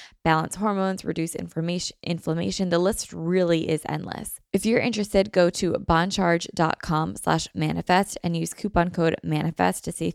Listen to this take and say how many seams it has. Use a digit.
1